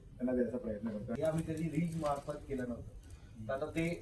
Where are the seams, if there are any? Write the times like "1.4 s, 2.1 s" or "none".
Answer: 1.1 s